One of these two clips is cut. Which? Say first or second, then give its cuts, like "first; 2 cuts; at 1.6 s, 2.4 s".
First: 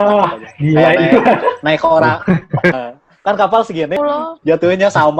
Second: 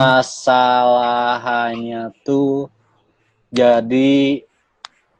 first; 2 cuts; at 2.8 s, 4.0 s